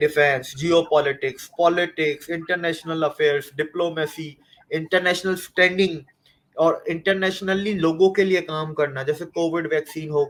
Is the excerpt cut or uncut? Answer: uncut